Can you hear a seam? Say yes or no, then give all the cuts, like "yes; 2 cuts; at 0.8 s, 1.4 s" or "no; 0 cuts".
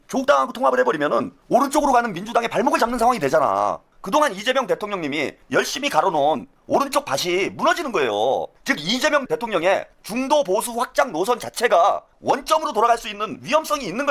yes; 4 cuts; at 1.4 s, 3.9 s, 5.4 s, 8.5 s